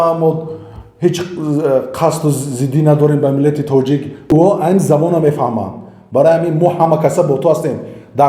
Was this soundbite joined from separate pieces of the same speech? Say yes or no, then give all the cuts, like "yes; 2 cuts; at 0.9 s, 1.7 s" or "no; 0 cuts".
yes; 1 cut; at 4.2 s